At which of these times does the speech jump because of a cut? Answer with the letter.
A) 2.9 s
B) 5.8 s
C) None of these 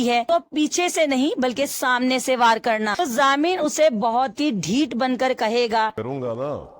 A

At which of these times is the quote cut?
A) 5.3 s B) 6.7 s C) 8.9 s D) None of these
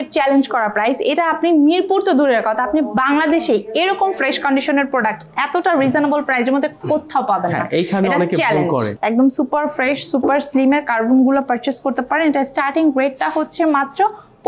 C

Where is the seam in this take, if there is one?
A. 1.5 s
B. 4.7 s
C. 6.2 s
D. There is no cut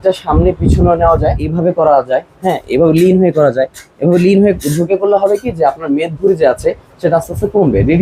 A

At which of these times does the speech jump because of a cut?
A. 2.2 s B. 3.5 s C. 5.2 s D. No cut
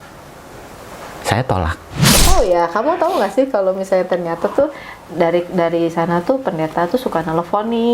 A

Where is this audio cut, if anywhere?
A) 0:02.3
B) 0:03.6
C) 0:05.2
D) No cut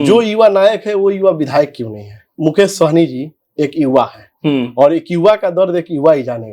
A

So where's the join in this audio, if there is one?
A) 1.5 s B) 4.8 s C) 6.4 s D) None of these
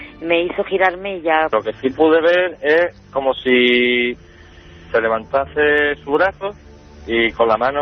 A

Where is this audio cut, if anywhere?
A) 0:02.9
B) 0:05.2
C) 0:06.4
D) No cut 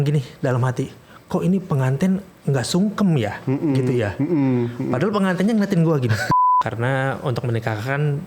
C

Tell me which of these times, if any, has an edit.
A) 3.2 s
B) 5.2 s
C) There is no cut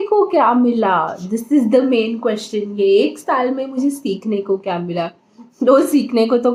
C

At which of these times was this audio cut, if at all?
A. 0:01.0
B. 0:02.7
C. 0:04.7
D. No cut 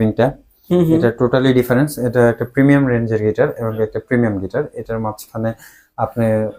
D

